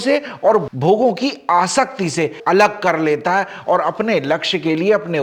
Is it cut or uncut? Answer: uncut